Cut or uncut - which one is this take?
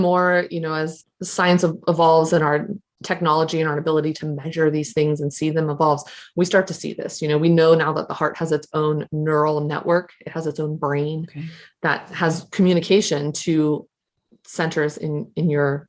cut